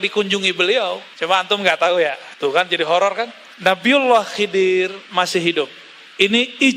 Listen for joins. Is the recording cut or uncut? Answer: cut